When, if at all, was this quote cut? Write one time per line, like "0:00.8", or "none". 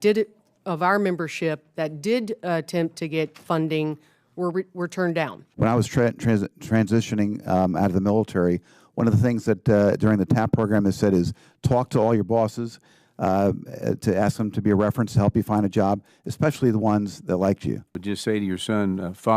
0:05.4
0:17.9